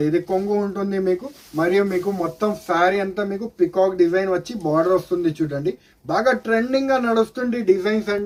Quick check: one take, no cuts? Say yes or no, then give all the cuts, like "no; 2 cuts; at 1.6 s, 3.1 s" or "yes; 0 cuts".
yes; 0 cuts